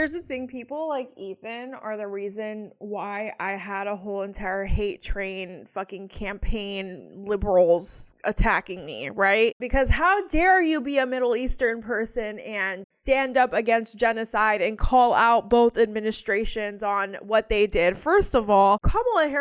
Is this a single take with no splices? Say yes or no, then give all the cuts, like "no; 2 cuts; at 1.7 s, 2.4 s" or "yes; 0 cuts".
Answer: yes; 0 cuts